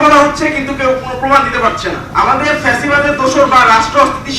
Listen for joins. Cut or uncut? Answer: cut